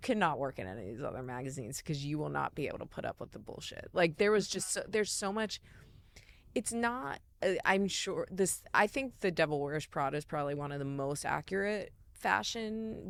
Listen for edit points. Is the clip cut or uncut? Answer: uncut